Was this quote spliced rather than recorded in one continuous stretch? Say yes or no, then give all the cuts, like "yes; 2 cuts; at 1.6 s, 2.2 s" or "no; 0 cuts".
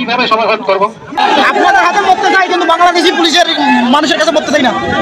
yes; 1 cut; at 1.2 s